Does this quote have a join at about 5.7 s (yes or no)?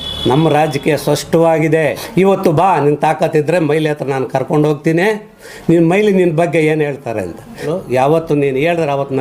no